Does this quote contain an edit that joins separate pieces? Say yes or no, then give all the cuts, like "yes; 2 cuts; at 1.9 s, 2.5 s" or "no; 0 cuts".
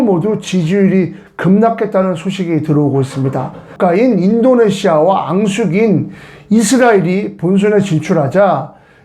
yes; 1 cut; at 3.7 s